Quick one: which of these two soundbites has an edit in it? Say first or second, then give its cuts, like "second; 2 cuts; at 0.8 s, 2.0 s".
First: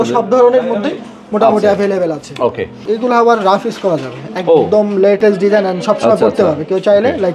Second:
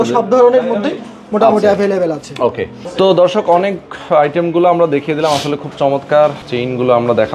first; 2 cuts; at 2.7 s, 5.2 s